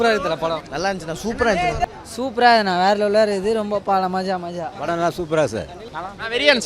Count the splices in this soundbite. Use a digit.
2